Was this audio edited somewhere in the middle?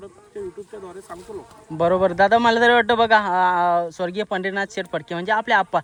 no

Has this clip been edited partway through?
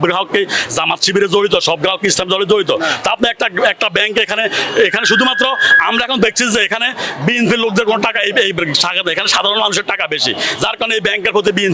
no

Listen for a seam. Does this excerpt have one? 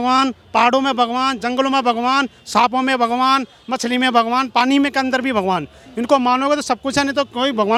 no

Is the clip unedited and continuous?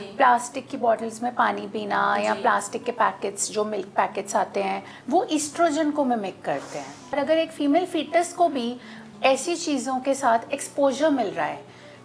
no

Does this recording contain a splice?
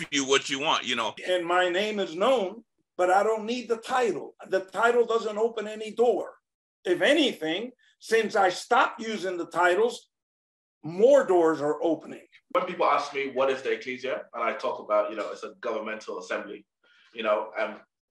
yes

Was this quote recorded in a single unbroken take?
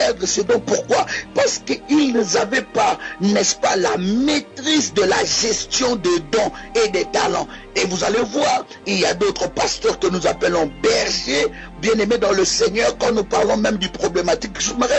no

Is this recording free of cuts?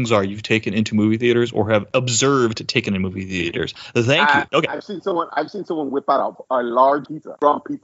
no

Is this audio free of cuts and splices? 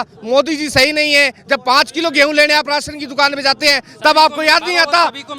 yes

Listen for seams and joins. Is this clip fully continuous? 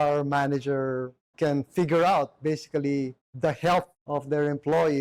yes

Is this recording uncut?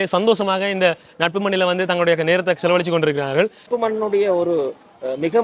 no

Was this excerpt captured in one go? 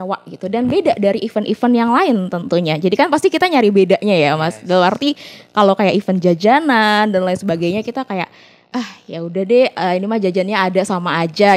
yes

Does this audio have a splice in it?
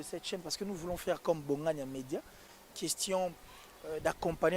no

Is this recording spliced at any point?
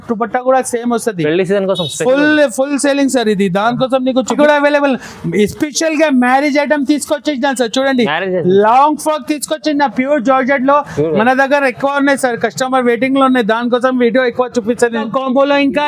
yes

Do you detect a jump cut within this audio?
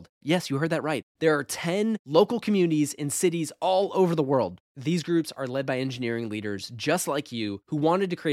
no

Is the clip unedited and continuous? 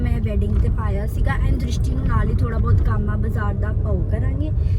yes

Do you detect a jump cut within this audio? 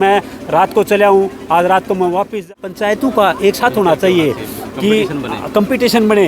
yes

